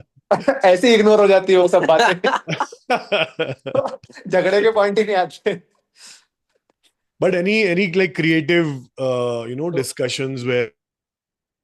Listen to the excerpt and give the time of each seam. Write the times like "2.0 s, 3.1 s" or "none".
none